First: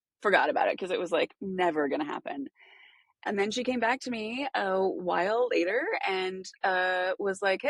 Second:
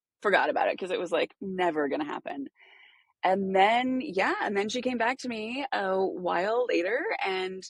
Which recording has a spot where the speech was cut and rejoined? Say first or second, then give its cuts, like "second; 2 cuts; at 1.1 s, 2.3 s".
first; 1 cut; at 3.2 s